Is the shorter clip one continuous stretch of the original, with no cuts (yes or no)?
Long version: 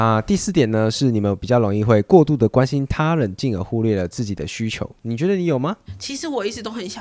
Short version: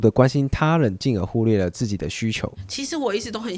no